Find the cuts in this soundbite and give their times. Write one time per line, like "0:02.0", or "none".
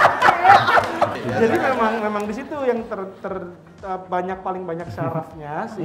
0:01.2